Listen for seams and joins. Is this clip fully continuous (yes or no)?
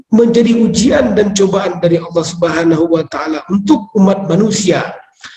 yes